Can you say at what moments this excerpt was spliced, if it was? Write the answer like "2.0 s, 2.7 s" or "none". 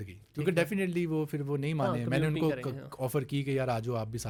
none